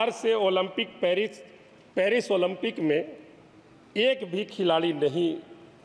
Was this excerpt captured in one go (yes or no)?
yes